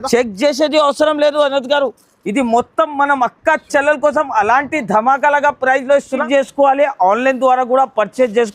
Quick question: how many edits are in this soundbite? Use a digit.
1